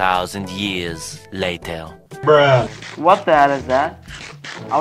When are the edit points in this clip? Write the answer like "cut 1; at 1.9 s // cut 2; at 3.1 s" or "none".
cut 1; at 1.9 s // cut 2; at 2.8 s

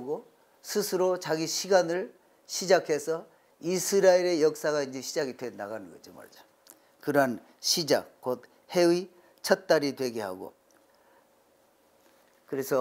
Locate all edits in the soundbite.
none

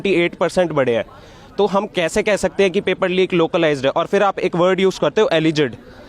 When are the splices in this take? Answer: none

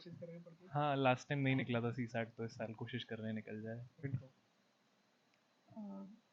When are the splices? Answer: cut 1; at 4.0 s

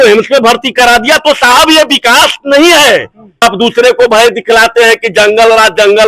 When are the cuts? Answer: cut 1; at 3.4 s

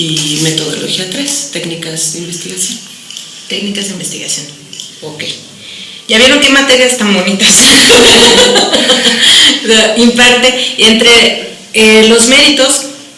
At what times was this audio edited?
cut 1; at 9.8 s

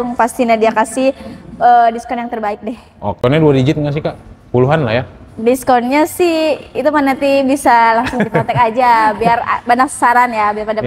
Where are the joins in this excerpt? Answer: cut 1; at 3.2 s

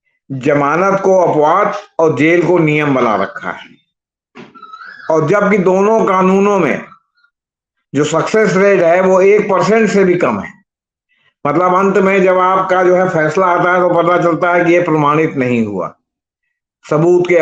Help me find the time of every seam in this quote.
none

